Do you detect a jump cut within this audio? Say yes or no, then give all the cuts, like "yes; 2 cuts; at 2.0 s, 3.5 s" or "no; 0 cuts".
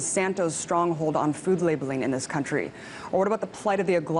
no; 0 cuts